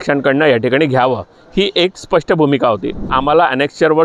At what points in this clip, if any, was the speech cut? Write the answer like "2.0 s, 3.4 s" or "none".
3.1 s